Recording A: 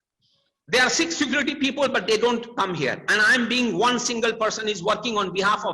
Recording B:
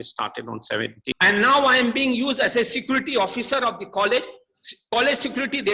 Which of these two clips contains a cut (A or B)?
B